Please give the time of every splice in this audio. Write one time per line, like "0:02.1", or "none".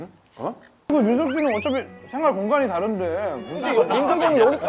0:00.9

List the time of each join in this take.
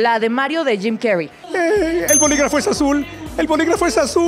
0:01.4

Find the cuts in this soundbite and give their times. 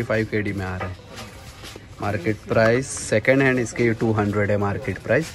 none

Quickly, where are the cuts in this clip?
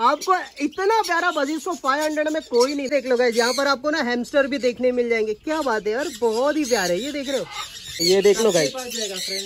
0:02.9
0:08.0

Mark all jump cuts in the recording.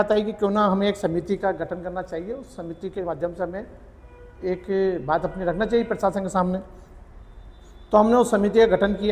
none

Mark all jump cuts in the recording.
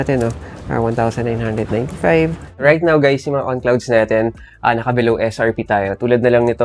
0:02.5

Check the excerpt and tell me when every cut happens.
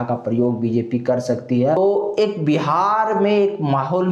0:01.8

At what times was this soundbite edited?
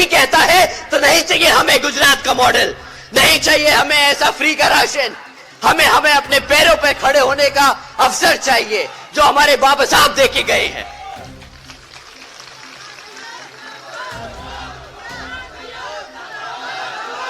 none

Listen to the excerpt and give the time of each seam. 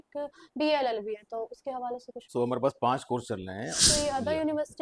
0:02.2
0:03.8

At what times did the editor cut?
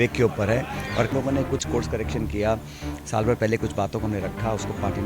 0:01.1

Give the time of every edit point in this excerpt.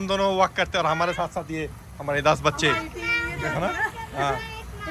none

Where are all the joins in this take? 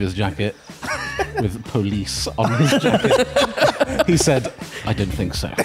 none

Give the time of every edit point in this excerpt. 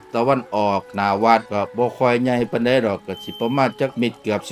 none

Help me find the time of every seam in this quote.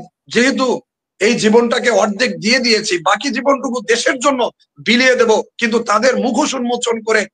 none

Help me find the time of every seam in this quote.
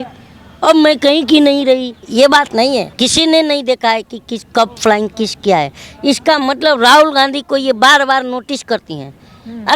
0:02.9

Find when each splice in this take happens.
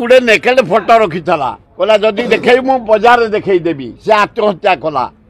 0:01.6

